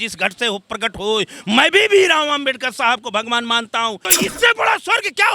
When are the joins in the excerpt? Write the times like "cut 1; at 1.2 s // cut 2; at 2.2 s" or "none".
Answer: cut 1; at 4.1 s